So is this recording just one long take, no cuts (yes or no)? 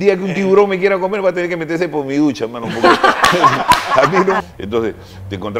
no